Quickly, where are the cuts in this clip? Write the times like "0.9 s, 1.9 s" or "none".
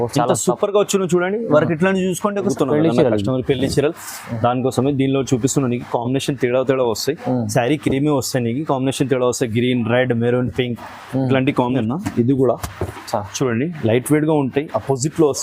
2.5 s, 11.8 s